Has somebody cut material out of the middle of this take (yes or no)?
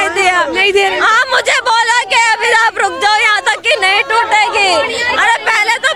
no